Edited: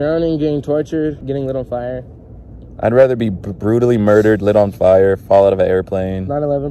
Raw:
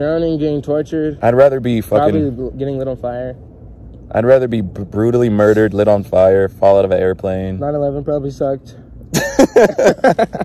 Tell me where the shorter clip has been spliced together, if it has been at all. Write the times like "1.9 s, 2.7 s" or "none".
1.1 s

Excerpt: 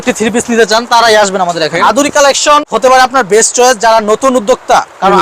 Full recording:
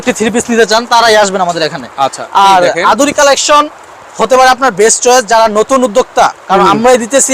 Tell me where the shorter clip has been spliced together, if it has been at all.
1.8 s, 2.7 s

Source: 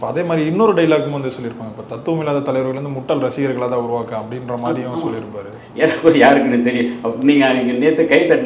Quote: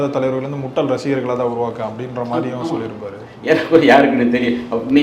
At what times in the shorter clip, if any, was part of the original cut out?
none

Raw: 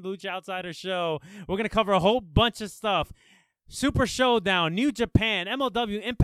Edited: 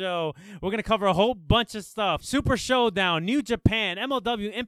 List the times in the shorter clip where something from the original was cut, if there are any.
2.2 s

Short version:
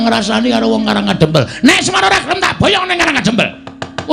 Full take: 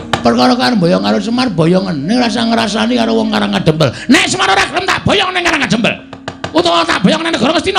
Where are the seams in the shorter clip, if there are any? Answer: none

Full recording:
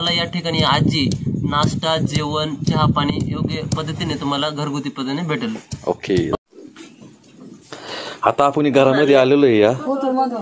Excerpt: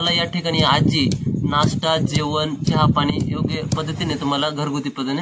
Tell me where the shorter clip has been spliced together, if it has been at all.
none

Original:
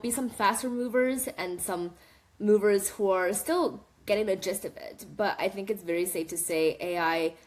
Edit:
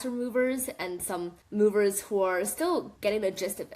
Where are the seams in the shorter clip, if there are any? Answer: 1.4 s, 2.9 s

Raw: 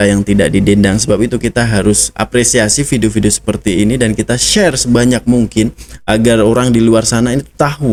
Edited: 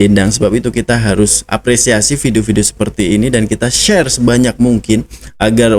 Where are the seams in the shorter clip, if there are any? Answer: none

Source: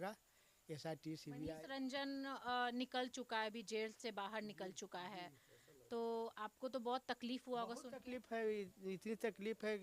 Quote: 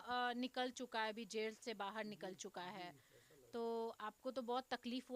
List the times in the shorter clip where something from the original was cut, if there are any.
none

